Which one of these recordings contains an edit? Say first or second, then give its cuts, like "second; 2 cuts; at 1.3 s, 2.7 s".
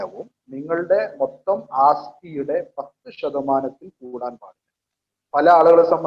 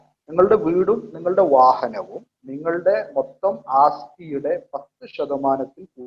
first; 1 cut; at 5.1 s